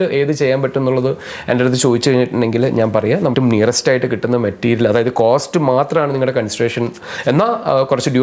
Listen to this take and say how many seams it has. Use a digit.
1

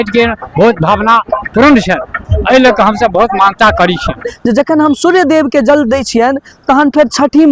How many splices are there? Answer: 1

